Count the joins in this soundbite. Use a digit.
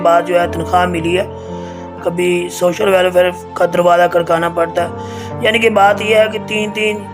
1